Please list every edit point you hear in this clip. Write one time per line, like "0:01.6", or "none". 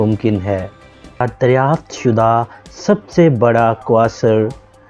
0:01.2